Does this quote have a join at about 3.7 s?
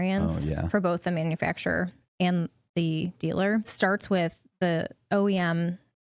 yes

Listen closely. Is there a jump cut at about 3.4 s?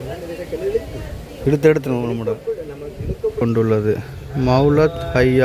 yes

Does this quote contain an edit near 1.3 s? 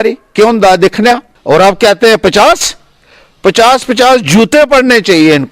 yes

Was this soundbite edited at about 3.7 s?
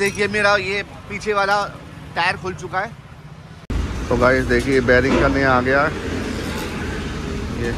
yes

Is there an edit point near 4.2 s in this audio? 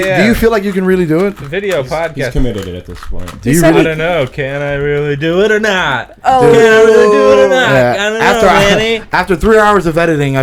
no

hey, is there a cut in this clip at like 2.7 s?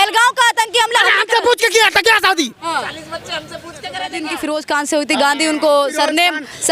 no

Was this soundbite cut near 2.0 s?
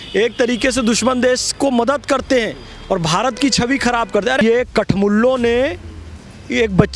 no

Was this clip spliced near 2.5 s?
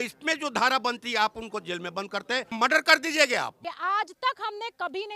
yes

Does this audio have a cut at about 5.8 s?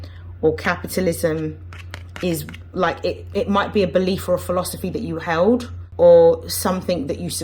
yes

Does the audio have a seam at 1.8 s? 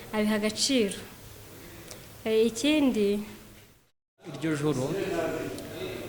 no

